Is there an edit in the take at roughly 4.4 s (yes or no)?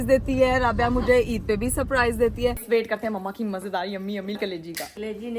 yes